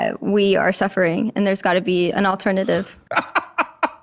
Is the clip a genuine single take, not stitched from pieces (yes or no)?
no